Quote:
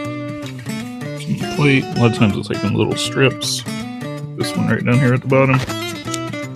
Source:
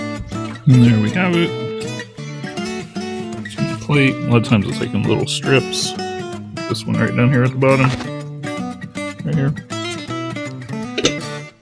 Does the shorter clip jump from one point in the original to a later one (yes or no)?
yes